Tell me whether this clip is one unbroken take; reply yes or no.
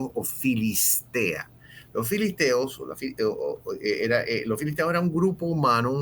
yes